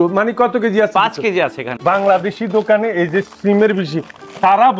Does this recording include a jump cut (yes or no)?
yes